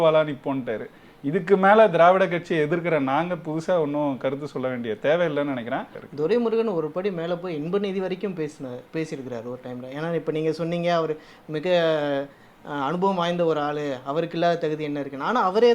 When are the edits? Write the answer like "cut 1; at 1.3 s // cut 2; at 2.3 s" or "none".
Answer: cut 1; at 6.0 s